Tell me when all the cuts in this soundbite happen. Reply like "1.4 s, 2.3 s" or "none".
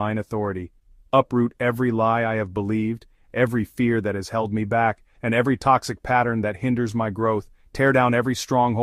none